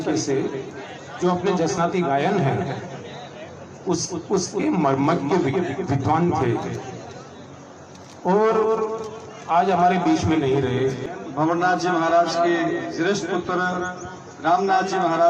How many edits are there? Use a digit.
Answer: 1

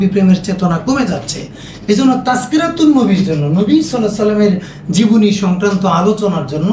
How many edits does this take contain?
0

